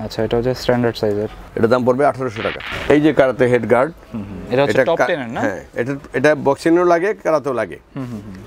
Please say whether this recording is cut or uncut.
cut